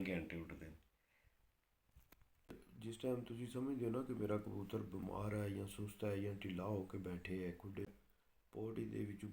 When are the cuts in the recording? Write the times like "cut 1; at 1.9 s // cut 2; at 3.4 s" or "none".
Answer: cut 1; at 2.6 s // cut 2; at 7.9 s